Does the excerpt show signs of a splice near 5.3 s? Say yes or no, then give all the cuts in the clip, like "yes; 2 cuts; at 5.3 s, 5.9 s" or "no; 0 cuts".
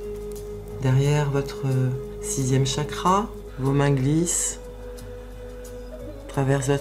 no; 1 cut; at 3.4 s